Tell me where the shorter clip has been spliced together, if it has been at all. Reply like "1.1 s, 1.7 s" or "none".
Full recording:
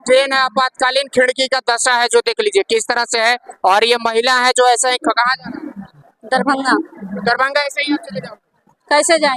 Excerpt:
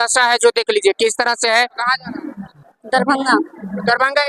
1.8 s